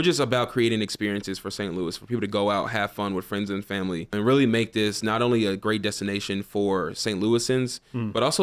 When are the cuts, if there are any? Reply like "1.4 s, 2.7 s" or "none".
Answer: 4.1 s